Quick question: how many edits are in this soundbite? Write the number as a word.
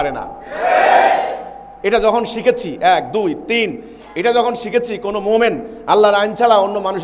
zero